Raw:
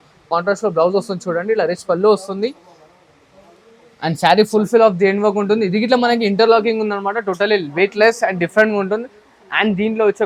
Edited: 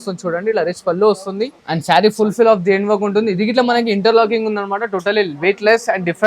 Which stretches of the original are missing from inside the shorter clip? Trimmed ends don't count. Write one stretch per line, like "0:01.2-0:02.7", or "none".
0:02.6-0:03.9